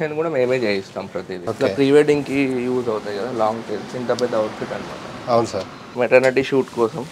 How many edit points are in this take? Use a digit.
2